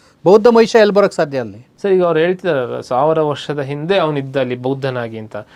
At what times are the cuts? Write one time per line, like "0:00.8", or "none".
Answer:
none